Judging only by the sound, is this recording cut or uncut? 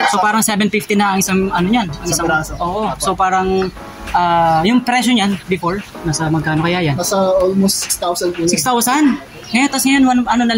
uncut